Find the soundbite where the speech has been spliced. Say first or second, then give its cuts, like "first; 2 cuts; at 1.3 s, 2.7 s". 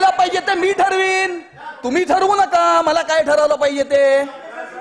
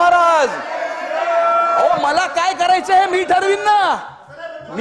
second; 1 cut; at 1.9 s